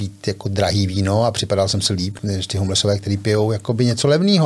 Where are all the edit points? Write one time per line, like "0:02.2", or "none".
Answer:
0:02.1